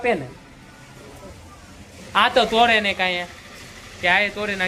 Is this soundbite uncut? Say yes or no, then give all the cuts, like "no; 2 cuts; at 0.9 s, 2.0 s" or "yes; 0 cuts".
yes; 0 cuts